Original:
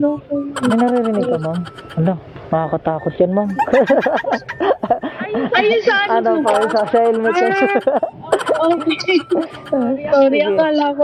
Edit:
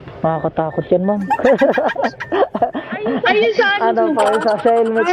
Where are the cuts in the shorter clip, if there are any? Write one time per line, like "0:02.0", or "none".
none